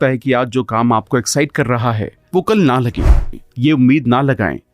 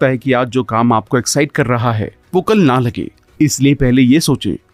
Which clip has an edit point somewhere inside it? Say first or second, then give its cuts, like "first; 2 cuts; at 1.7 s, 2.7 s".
first; 1 cut; at 3.2 s